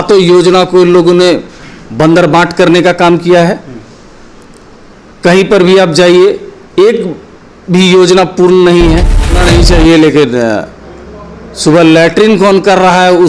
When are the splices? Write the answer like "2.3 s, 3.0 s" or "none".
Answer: 9.4 s